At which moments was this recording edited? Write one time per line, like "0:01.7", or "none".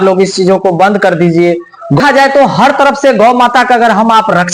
0:02.0